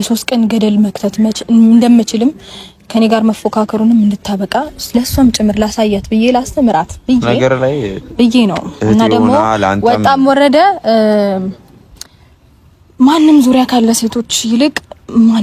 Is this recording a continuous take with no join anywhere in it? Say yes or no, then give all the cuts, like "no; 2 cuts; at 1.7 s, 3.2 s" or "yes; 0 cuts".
yes; 0 cuts